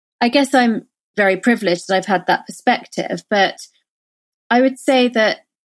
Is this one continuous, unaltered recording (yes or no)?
no